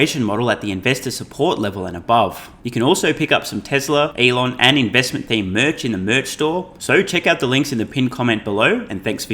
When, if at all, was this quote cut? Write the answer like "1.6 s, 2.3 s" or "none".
2.5 s, 4.1 s, 6.7 s